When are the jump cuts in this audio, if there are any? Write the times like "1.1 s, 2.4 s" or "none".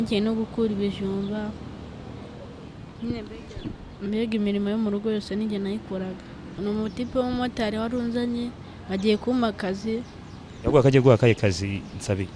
6.6 s